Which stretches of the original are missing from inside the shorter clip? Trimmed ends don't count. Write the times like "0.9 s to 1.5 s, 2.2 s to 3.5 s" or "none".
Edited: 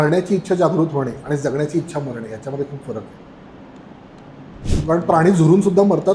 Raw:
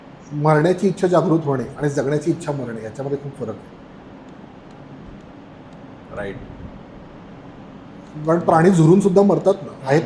5.3 s to 8.1 s